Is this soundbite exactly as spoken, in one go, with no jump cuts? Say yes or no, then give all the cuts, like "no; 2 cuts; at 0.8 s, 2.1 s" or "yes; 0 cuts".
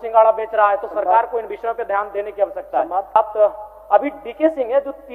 no; 1 cut; at 3.2 s